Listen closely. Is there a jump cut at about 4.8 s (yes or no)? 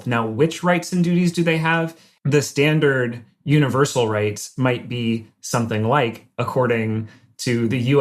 no